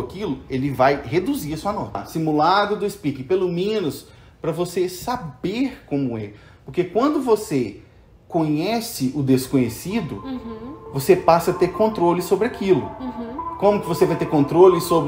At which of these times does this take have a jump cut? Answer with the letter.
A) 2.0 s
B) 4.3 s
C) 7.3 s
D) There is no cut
A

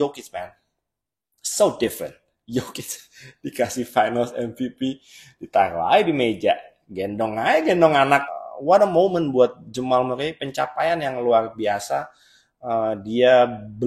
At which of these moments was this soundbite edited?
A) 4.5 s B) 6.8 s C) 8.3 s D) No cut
C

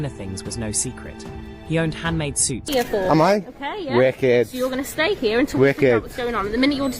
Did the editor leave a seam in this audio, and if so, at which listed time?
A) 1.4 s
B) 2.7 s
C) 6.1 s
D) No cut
B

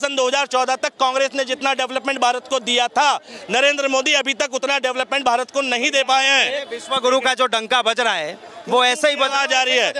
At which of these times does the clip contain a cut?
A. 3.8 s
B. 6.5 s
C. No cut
C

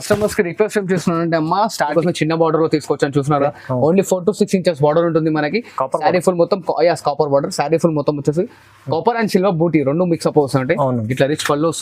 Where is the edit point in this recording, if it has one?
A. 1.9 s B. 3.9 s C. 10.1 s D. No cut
A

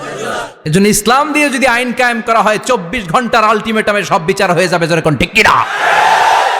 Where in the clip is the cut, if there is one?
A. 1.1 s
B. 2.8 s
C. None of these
C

